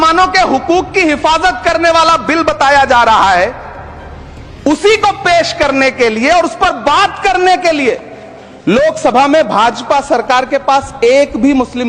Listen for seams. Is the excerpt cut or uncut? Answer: uncut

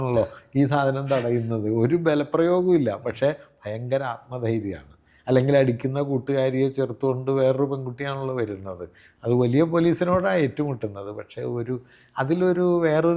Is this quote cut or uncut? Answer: uncut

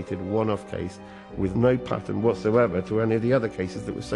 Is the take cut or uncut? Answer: uncut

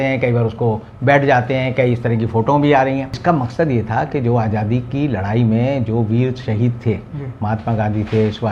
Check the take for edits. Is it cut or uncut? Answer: cut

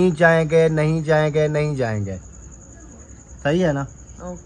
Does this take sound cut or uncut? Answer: uncut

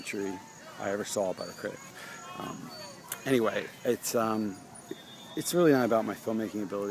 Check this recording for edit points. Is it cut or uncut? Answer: cut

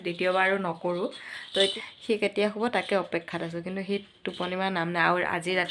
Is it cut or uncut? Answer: cut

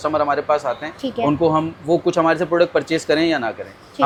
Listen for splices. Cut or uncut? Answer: uncut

